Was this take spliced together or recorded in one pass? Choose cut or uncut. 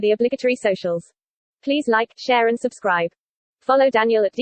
uncut